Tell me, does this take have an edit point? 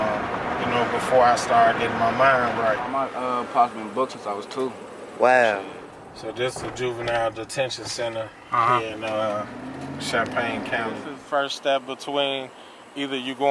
yes; 3 cuts; at 2.9 s, 6.1 s, 11.1 s

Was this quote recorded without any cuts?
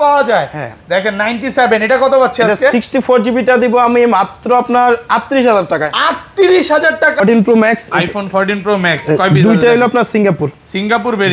no; 1 cut; at 7.1 s

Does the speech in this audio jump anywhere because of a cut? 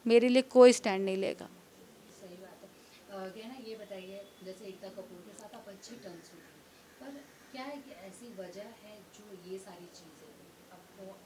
no; 0 cuts

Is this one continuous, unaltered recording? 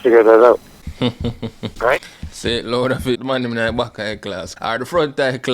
no; 2 cuts; at 3.2 s, 4.5 s

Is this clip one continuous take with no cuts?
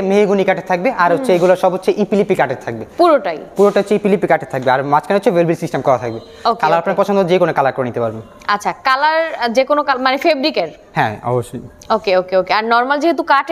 yes; 0 cuts

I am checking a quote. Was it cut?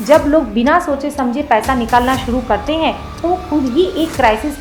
no; 0 cuts

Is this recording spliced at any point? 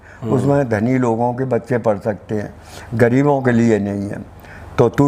no; 0 cuts

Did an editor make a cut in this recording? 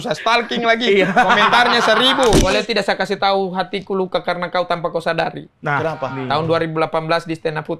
yes; 1 cut; at 2.4 s

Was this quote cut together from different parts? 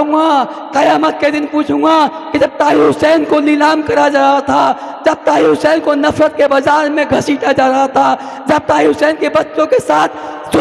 no; 0 cuts

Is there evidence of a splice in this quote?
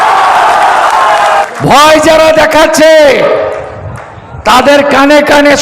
yes; 1 cut; at 1.3 s

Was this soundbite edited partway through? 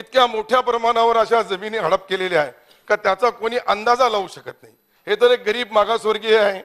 no; 0 cuts

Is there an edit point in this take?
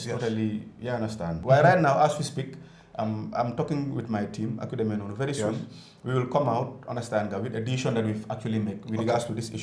yes; 1 cut; at 1.4 s

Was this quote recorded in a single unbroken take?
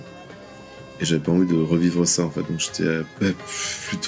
no; 1 cut; at 3.1 s

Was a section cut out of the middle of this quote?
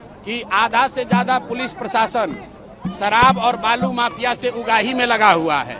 no; 0 cuts

